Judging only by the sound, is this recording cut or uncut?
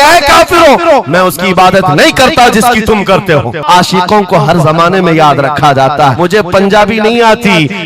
cut